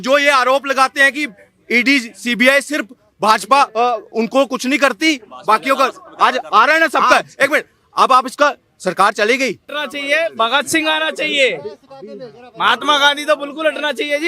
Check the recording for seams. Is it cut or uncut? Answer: cut